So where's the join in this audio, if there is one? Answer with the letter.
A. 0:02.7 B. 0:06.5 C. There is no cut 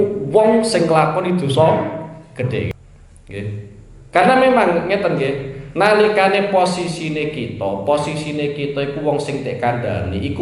A